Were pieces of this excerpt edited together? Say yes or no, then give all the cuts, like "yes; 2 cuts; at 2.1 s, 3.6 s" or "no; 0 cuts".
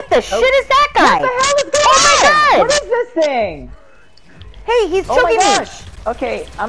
no; 0 cuts